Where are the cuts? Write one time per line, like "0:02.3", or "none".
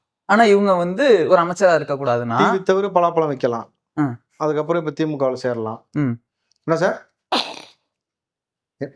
none